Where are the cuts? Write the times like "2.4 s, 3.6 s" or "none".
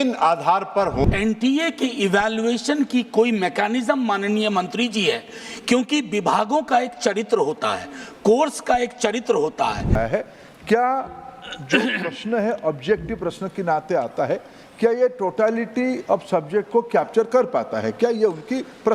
1.1 s, 10.0 s